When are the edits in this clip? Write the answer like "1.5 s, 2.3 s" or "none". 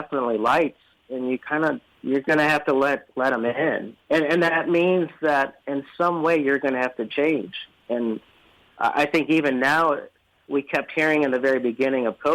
1.9 s, 3.9 s